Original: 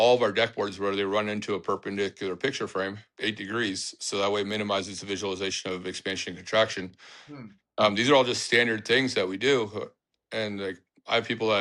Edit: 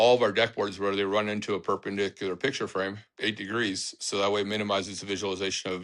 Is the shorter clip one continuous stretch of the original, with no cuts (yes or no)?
yes